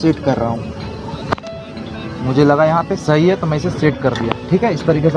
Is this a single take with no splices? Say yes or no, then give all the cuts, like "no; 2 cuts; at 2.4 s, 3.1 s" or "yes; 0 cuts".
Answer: yes; 0 cuts